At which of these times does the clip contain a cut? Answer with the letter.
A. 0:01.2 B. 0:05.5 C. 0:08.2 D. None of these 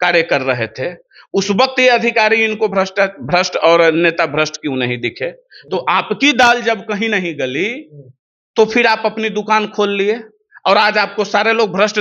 B